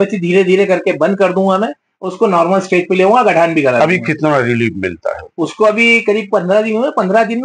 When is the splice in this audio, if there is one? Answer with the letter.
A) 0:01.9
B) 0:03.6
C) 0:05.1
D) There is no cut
D